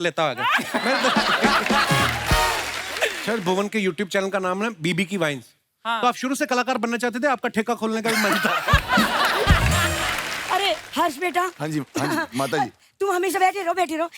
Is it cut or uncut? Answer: cut